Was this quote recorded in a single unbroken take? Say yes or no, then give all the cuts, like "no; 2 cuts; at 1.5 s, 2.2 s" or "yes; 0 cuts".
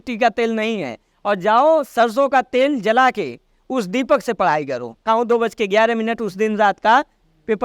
no; 1 cut; at 5.0 s